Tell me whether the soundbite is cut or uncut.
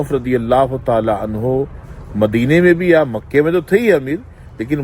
uncut